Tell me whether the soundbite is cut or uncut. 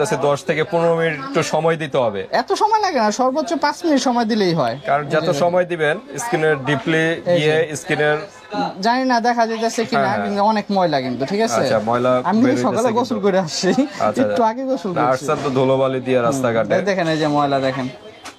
uncut